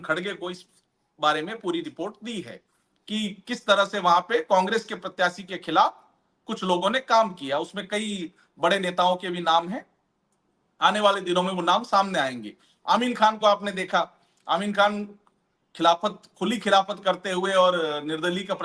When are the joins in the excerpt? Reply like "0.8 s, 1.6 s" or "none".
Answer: none